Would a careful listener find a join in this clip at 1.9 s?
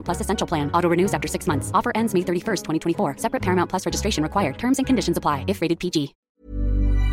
no; 1 cut; at 6.2 s

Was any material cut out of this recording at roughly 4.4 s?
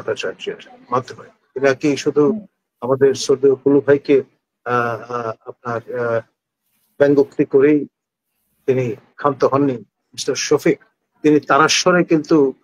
no; 1 cut; at 10.0 s

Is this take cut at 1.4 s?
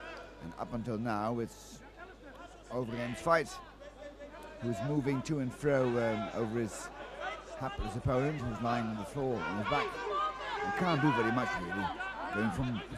yes; 1 cut; at 1.4 s

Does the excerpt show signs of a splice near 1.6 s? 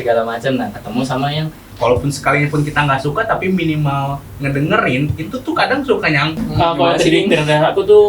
yes; 2 cuts; at 1.6 s, 6.3 s

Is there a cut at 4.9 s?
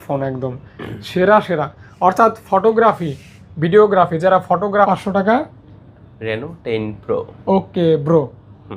yes; 1 cut; at 4.9 s

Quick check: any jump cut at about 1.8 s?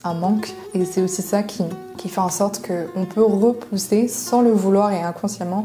no; 0 cuts

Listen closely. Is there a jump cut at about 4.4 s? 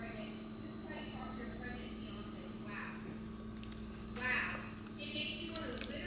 no; 0 cuts

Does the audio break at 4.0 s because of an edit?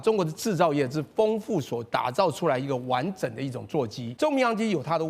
yes; 1 cut; at 4.0 s

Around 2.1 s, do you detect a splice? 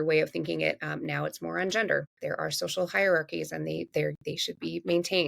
yes; 1 cut; at 2.1 s

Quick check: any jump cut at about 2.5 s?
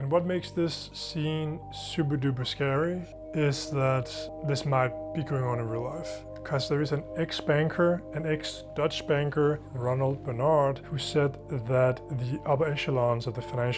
no; 4 cuts; at 1.3 s, 4.3 s, 9.7 s, 10.9 s

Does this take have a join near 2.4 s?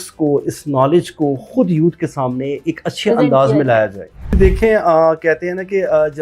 no; 1 cut; at 4.4 s

